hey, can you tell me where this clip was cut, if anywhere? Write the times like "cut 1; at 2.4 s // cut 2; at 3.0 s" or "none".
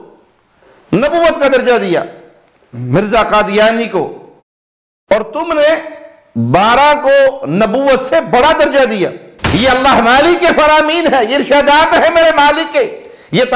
cut 1; at 9.5 s